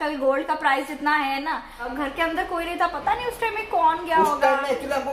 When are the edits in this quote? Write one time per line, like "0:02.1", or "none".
0:01.9